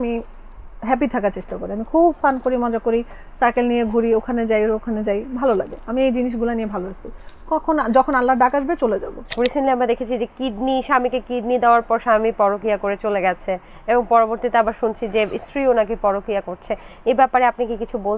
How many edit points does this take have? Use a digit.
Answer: 1